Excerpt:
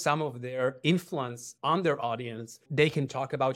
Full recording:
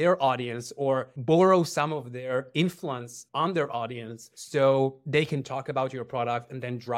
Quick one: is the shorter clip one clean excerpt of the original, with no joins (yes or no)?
no